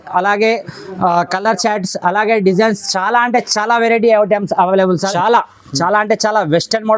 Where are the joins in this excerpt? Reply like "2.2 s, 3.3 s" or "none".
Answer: 5.1 s

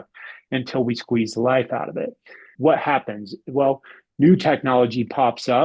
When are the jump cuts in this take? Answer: 2.5 s

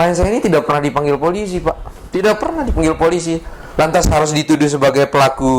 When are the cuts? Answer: 2.0 s

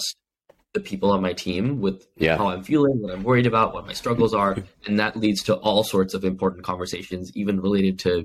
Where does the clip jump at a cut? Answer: none

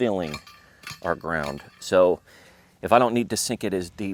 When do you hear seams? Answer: none

